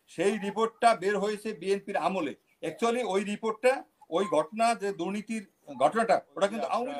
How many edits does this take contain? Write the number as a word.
zero